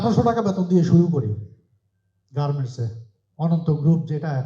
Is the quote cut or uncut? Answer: uncut